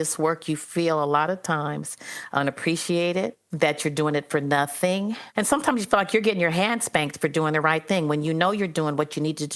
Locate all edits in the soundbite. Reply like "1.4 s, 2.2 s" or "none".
3.4 s, 5.2 s